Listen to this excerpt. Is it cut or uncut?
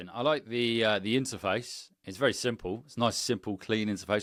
uncut